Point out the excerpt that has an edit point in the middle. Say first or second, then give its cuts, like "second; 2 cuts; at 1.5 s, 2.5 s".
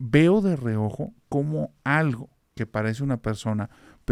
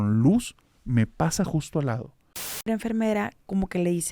second; 1 cut; at 2.7 s